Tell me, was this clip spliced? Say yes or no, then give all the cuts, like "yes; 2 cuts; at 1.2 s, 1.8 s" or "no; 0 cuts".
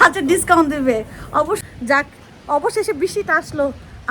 yes; 1 cut; at 1.6 s